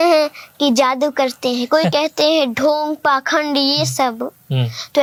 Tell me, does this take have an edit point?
no; 0 cuts

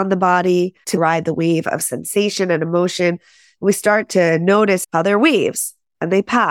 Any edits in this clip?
yes; 2 cuts; at 0.9 s, 4.8 s

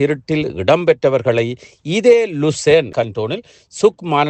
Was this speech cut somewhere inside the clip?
yes; 1 cut; at 2.9 s

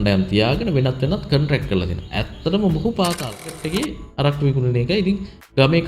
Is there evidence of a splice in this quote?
yes; 1 cut; at 3.5 s

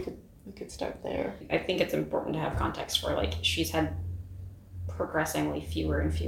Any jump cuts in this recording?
yes; 1 cut; at 1.5 s

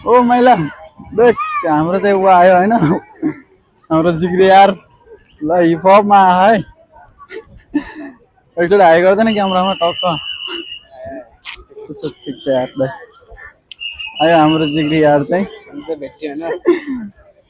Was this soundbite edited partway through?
no; 0 cuts

